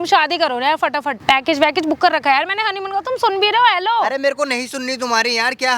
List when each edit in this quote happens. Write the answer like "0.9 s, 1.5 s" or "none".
1.1 s